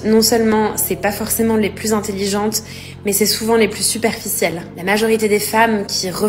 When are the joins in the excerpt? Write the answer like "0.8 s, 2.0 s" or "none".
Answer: 1.2 s